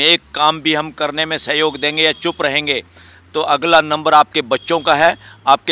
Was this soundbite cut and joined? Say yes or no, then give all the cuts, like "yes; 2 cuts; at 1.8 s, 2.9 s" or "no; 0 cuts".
no; 0 cuts